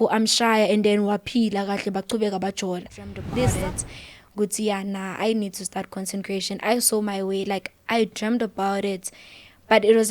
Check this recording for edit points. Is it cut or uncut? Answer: cut